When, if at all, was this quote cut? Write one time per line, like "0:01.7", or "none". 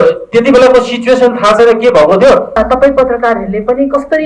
0:02.6